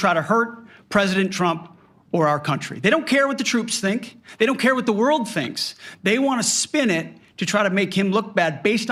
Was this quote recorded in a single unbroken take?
yes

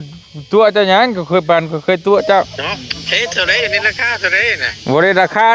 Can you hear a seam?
yes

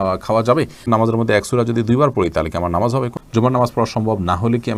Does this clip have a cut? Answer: yes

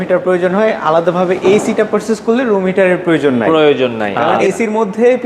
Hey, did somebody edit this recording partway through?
yes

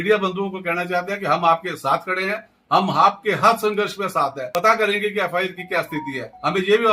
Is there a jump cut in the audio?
yes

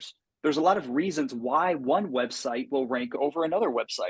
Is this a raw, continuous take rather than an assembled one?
no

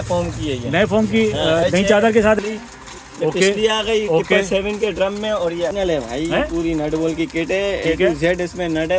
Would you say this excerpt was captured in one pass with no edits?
no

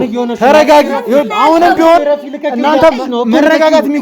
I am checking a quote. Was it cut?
no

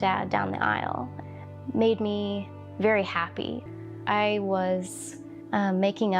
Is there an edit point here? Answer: yes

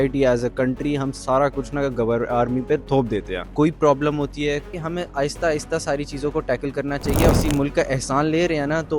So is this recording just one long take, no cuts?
no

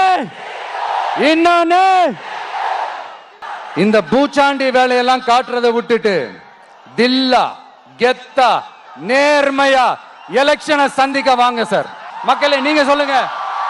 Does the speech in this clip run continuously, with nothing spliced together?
no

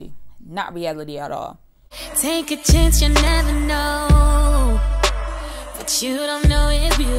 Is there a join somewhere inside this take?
yes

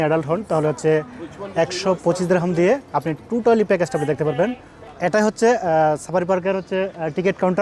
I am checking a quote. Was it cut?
yes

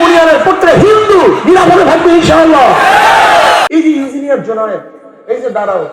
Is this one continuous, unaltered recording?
no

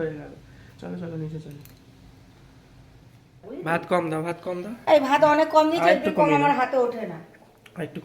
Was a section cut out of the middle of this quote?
yes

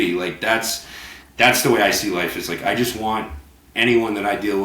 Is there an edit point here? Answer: no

